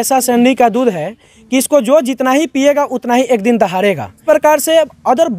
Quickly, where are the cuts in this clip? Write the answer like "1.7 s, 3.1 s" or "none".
4.1 s